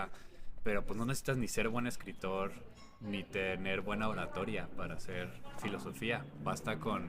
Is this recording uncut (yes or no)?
yes